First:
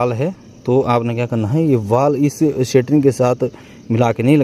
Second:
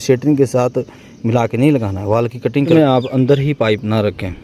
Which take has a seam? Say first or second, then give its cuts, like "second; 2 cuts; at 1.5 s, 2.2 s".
second; 1 cut; at 2.7 s